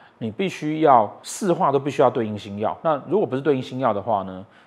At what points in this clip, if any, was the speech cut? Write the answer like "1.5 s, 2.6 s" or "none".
1.2 s, 2.8 s